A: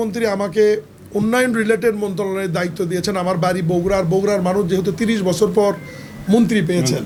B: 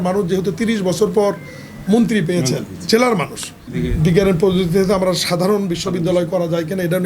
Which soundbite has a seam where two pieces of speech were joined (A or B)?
B